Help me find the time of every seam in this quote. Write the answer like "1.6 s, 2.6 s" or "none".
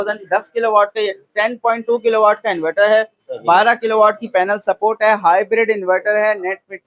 none

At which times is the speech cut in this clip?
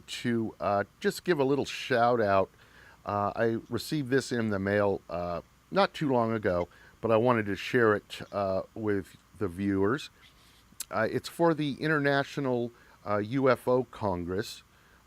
1.5 s

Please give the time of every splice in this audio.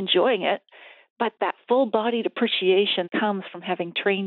1.3 s, 3.1 s

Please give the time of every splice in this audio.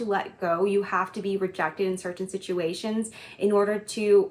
none

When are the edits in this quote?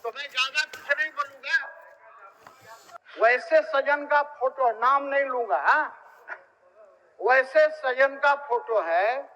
3.0 s

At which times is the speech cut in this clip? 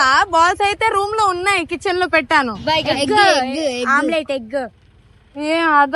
none

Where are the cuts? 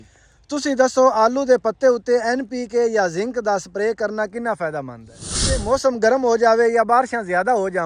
5.6 s

